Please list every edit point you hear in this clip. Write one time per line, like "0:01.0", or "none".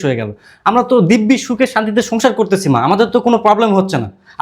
none